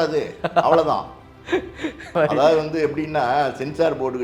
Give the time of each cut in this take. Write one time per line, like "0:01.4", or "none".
0:02.1